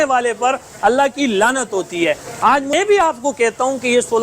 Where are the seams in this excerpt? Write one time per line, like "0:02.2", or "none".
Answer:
0:02.7